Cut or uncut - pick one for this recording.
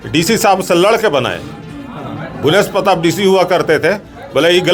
uncut